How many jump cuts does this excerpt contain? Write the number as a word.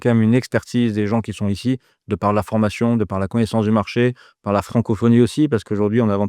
zero